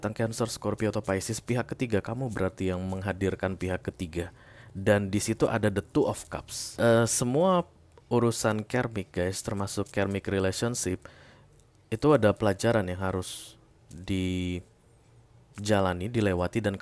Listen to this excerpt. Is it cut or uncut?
cut